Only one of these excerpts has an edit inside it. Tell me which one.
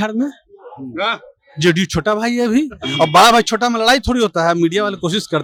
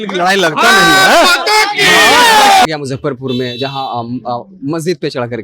second; 1 cut; at 2.7 s

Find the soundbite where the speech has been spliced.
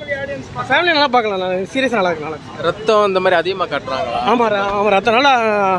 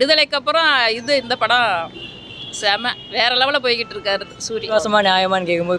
second; 1 cut; at 4.7 s

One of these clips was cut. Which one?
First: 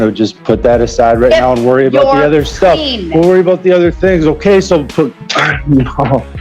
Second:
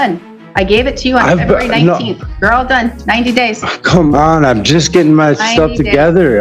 first; 1 cut; at 5.1 s

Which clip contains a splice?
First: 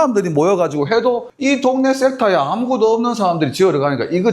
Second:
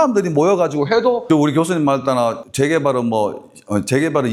first; 1 cut; at 1.2 s

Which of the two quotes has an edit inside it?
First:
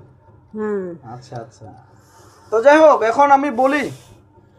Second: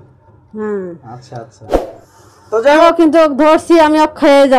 second; 1 cut; at 2.8 s

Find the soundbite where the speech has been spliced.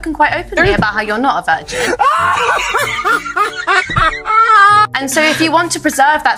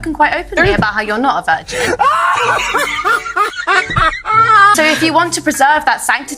second; 1 cut; at 4.7 s

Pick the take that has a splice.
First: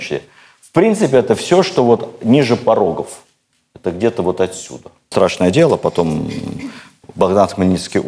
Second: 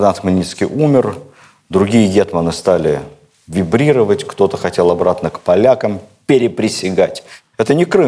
first; 1 cut; at 5.1 s

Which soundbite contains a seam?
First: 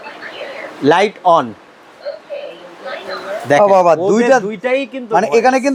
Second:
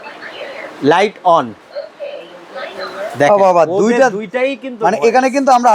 second; 1 cut; at 1.6 s

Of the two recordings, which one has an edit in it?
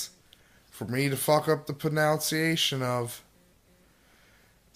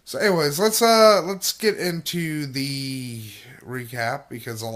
second; 1 cut; at 3.1 s

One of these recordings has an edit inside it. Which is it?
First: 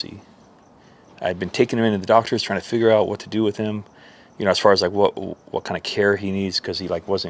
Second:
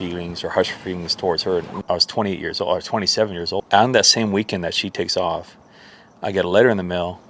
second; 2 cuts; at 1.7 s, 3.6 s

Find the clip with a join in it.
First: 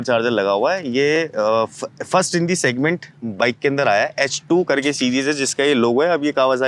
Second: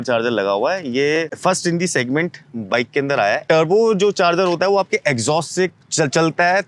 second; 2 cuts; at 1.3 s, 3.4 s

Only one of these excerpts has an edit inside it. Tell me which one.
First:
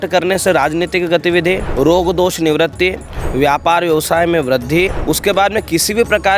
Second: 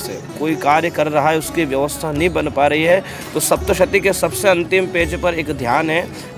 first; 2 cuts; at 1.7 s, 5.0 s

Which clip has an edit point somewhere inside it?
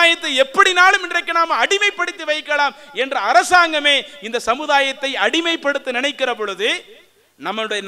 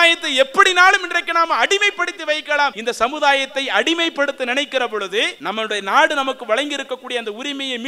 second; 2 cuts; at 2.8 s, 5.4 s

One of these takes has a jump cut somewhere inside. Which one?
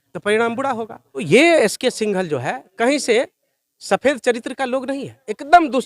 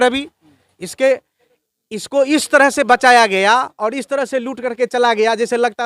first; 1 cut; at 1.2 s

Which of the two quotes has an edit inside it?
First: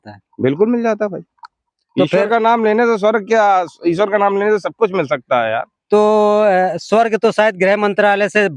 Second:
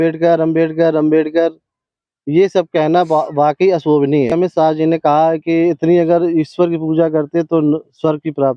second; 1 cut; at 4.3 s

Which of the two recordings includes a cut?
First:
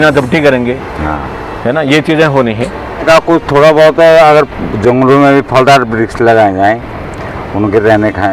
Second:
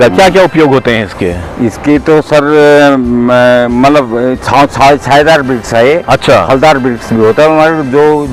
first; 1 cut; at 3.0 s

